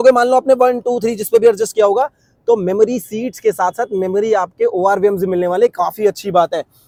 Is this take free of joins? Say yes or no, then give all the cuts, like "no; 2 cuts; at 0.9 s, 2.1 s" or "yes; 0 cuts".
yes; 0 cuts